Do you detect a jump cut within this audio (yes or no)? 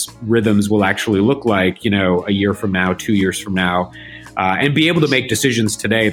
no